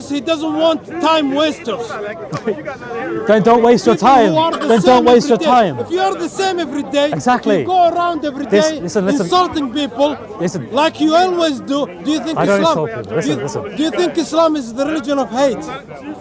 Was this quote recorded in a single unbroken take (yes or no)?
yes